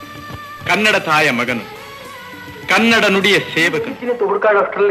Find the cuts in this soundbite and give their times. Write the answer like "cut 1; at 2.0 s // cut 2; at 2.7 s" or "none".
cut 1; at 4.0 s